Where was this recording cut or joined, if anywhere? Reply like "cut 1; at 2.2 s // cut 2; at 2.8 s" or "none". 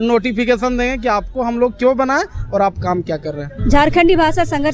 none